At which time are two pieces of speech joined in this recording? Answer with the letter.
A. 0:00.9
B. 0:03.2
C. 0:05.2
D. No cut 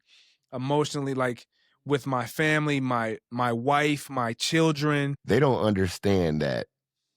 C